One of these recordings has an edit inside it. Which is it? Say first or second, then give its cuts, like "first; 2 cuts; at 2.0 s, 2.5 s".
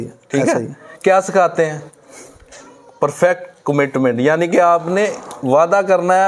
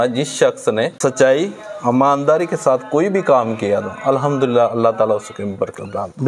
second; 1 cut; at 1.0 s